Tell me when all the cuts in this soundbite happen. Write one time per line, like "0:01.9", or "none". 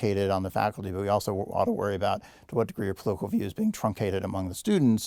none